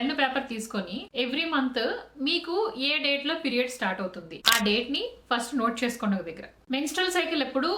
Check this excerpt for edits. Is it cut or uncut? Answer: uncut